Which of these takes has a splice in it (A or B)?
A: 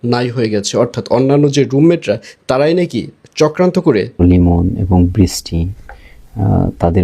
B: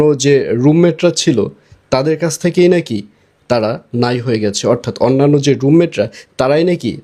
A